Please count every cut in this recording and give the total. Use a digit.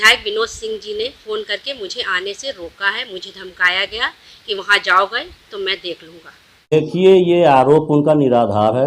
1